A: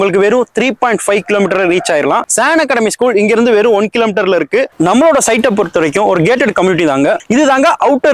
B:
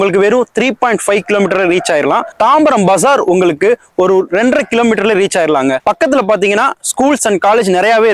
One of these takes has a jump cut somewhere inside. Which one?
A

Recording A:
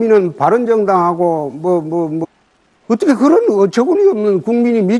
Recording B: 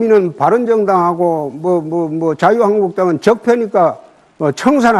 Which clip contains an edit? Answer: B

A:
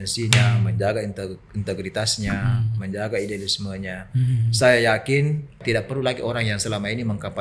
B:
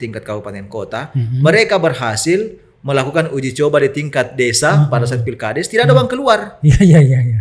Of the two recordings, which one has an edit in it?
A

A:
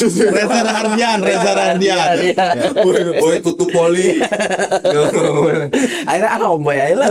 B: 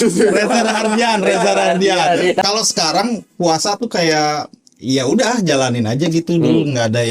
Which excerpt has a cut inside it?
B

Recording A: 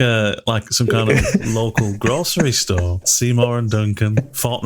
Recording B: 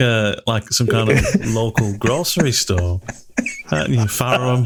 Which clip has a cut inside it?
A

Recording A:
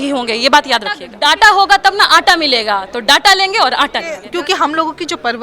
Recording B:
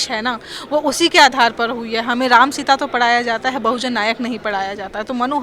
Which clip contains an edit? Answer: A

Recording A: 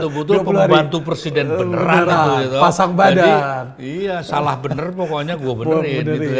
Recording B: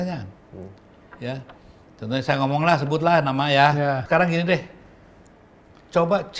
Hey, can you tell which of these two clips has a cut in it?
B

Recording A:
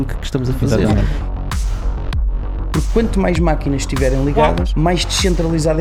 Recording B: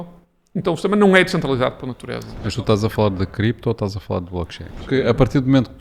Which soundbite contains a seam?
B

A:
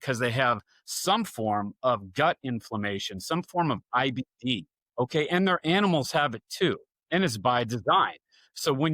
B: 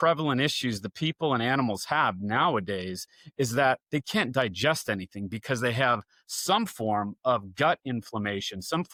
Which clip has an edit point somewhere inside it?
A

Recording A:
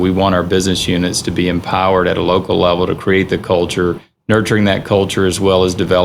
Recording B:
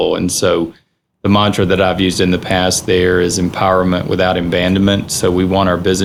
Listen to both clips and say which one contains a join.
A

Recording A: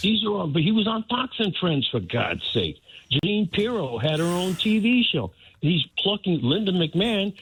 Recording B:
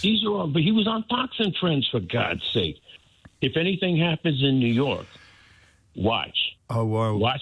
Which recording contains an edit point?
B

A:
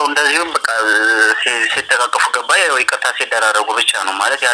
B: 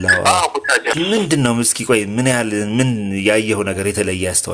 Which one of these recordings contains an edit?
B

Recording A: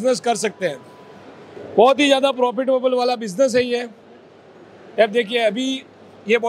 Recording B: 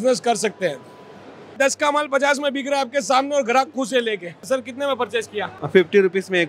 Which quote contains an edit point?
B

